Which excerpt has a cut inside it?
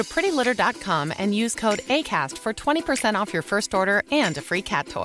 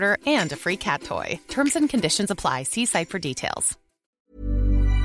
second; 1 cut; at 4.1 s

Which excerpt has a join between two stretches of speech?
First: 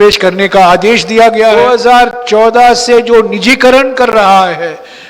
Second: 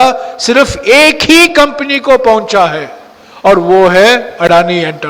first; 1 cut; at 1.6 s

